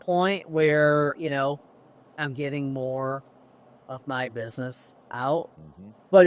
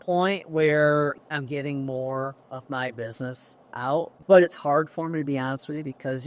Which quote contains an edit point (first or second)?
second